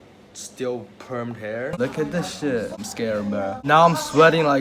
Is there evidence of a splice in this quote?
yes; 2 cuts; at 1.8 s, 2.8 s

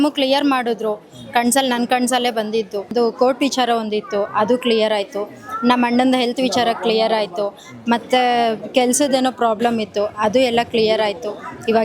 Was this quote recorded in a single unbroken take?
no; 1 cut; at 2.9 s

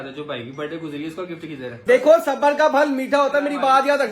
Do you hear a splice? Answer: yes; 1 cut; at 1.7 s

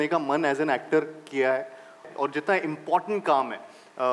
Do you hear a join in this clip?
yes; 1 cut; at 2.1 s

